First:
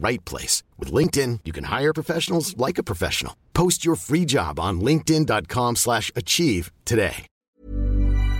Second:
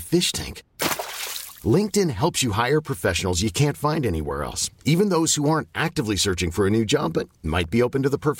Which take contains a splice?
first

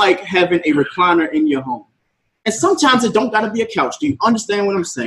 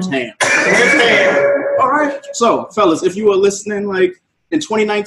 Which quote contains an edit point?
second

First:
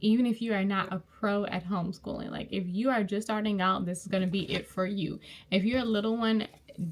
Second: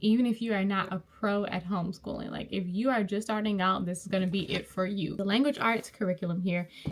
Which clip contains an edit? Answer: second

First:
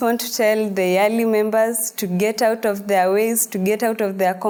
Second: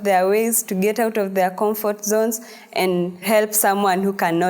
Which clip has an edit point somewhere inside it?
second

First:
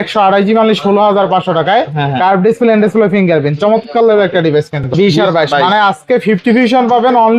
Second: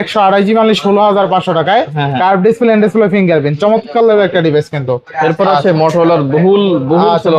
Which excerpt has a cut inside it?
first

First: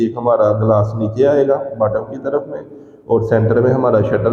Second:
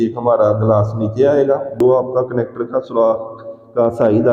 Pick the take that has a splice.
second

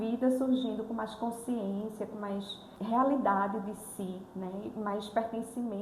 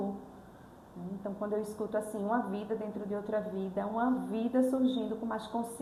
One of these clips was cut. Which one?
first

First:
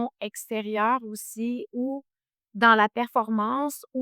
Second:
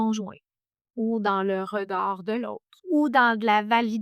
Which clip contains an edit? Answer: second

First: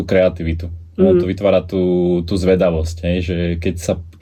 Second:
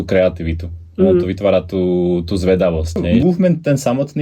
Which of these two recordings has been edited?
second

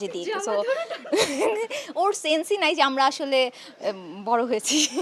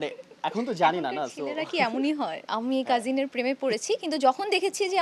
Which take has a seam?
second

